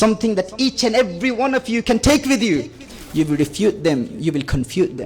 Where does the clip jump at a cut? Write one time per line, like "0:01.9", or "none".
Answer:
0:02.9